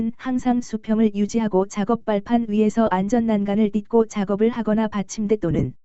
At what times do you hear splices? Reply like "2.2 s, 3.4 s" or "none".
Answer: 4.6 s

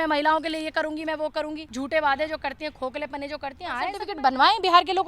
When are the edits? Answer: 1.6 s, 4.0 s

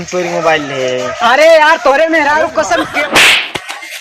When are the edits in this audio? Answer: 3.0 s

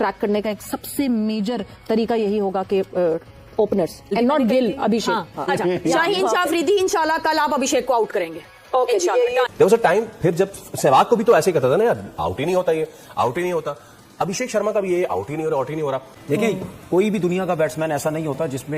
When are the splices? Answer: 5.3 s, 9.5 s, 16.1 s

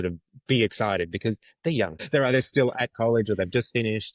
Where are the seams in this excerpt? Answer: 2.0 s

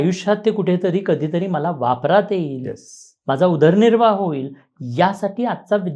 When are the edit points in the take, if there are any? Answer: none

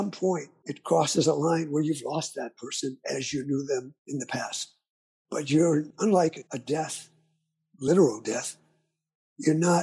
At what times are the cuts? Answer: none

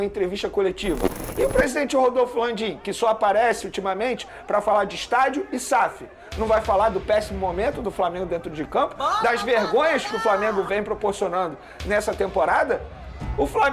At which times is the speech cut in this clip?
1.2 s

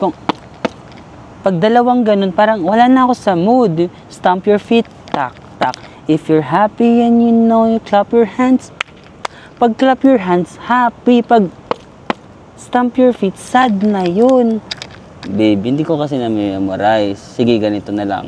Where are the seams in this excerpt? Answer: 14.7 s

